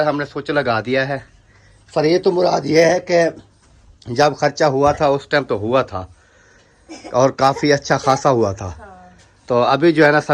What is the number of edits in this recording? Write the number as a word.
zero